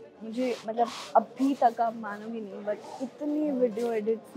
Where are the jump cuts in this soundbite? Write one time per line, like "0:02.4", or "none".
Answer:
none

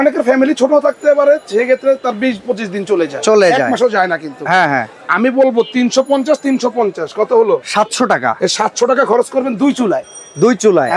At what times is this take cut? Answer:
none

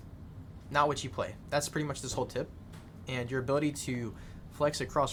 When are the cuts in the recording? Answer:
none

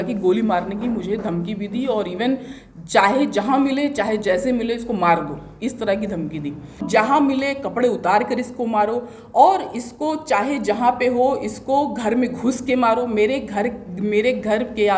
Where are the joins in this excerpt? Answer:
0:06.8

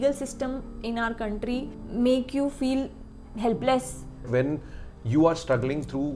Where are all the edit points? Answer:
0:01.8
0:04.3

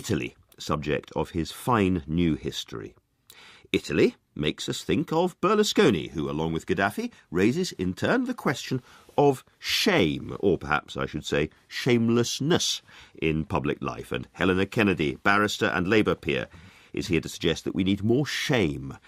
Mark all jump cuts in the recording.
0:11.7

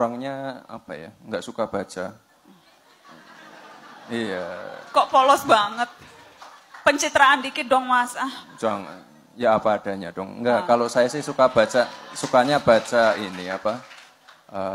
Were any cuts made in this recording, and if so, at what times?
none

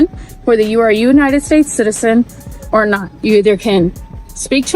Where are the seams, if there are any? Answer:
0:03.1

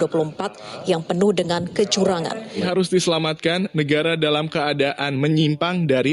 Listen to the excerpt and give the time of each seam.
0:02.6

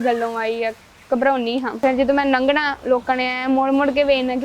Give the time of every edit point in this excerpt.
0:01.7

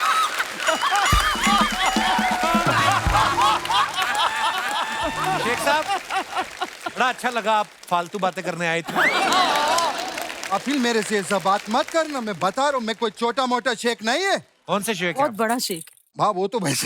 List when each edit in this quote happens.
0:05.5

